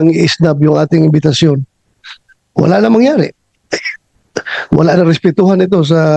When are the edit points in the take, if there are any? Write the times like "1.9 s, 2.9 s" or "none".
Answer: none